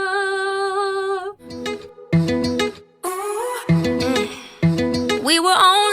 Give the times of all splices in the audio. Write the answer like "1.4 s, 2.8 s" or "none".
1.5 s

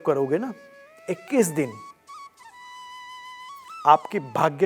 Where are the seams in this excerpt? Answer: 1.7 s, 3.8 s

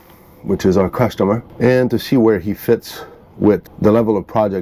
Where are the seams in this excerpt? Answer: 1.5 s, 3.7 s

